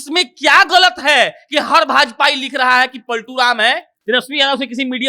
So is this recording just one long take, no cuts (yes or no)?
no